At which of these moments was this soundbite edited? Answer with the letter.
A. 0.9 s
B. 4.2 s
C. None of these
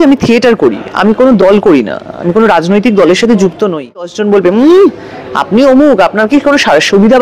B